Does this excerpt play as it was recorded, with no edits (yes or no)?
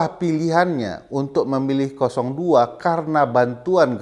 yes